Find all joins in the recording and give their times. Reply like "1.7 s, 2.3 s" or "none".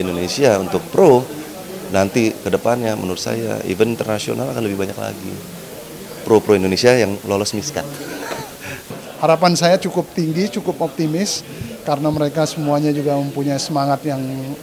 8.8 s